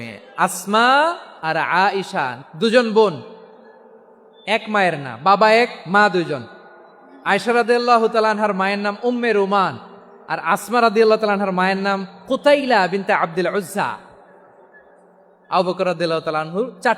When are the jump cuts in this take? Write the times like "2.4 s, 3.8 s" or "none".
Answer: 1.3 s, 2.4 s